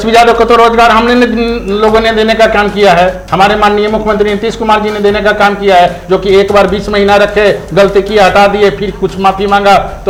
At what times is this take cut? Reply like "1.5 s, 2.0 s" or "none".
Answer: none